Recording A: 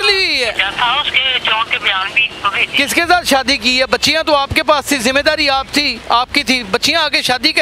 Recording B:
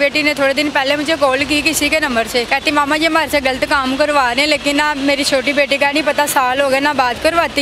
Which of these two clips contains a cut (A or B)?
B